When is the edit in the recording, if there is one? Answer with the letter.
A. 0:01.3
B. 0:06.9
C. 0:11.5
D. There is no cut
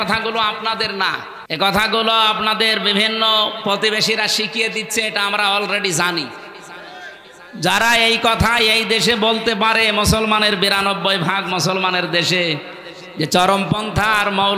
A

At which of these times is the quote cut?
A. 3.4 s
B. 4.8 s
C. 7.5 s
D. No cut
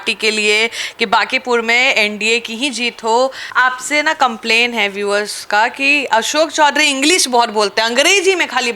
A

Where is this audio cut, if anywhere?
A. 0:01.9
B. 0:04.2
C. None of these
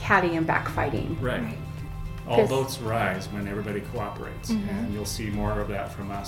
A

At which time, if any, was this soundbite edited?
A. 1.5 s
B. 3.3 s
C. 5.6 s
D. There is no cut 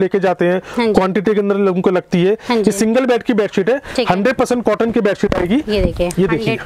D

